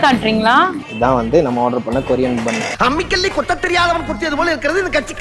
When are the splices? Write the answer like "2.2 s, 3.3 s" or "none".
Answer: none